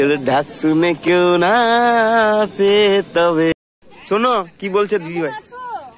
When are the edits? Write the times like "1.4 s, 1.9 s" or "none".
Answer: 3.6 s